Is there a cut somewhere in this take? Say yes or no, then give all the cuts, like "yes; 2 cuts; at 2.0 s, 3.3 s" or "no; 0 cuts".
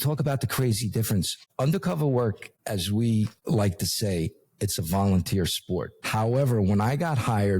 yes; 4 cuts; at 1.4 s, 2.5 s, 3.4 s, 6.0 s